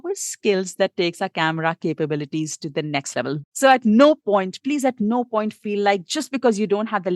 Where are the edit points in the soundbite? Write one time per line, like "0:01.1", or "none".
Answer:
0:03.3

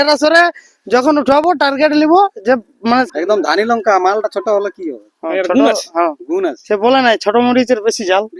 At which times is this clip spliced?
0:03.1

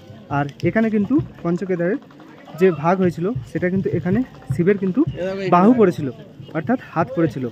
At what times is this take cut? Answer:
none

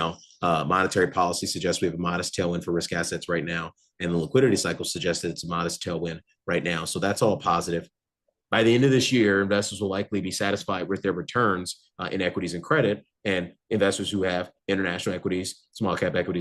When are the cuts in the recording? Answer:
0:08.0

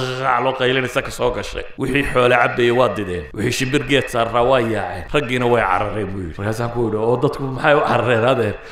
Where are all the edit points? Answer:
0:01.6
0:03.2
0:05.0
0:06.3

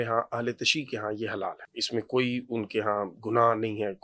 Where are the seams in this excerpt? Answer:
0:01.7

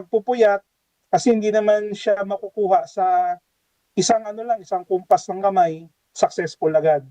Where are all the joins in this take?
none

